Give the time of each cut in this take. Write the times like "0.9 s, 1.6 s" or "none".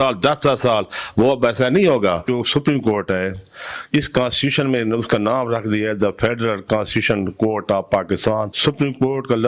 2.2 s, 8.5 s